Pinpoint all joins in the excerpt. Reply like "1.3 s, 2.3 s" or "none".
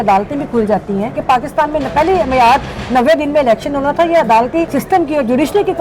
1.2 s, 4.8 s